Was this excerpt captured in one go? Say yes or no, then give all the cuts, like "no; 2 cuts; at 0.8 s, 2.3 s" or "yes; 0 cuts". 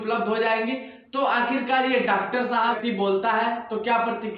no; 1 cut; at 2.8 s